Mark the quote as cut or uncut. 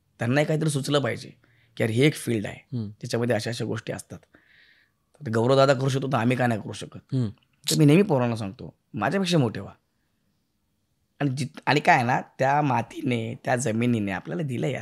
uncut